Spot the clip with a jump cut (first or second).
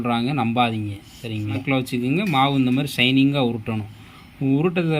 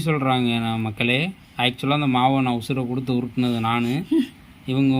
first